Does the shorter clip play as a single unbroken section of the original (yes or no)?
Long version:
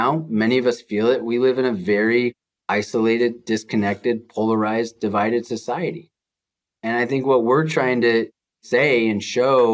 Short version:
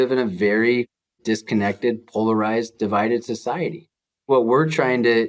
no